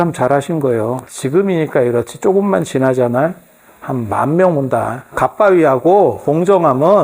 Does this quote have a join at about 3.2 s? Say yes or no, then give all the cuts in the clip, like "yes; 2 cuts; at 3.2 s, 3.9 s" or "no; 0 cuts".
no; 3 cuts; at 1.1 s, 5.1 s, 6.2 s